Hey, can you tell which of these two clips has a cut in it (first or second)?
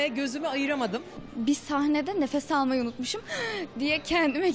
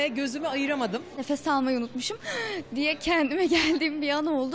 second